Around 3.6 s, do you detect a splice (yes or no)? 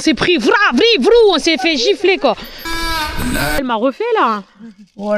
yes